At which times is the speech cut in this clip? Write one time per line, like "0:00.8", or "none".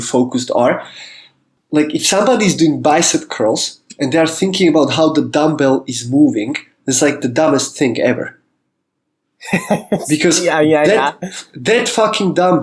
0:01.6